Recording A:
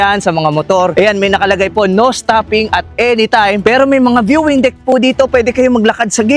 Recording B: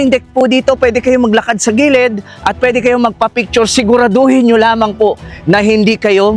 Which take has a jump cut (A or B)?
A